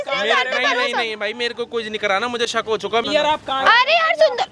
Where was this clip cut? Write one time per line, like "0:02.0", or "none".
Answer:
0:03.0